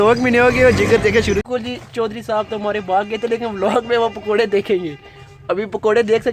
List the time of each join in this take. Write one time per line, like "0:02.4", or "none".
0:01.5